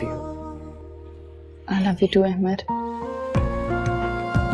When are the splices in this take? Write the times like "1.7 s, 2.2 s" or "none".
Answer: none

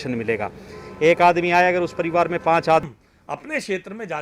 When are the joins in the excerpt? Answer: 2.9 s

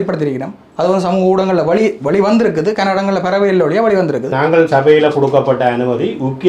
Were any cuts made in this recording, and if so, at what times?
4.3 s

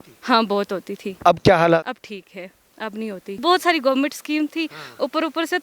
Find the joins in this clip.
1.8 s, 3.4 s

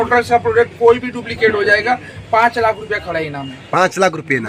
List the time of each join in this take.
none

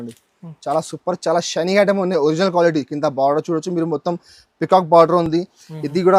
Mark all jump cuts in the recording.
none

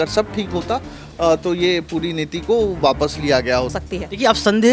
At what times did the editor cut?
3.7 s

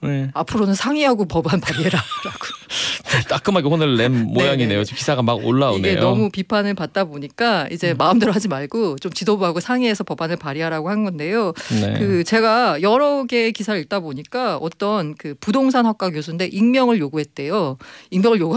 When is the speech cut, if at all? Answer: none

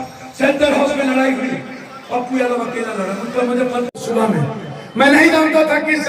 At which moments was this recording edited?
4.0 s

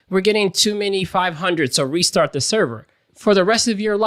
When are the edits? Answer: 3.1 s

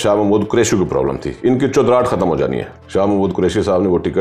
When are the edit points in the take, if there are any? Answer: 3.2 s

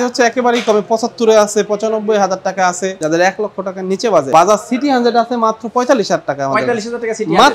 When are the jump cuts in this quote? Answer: 3.0 s, 4.3 s

